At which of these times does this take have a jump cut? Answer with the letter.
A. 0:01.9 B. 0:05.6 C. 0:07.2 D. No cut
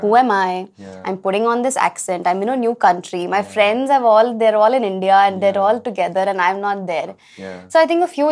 D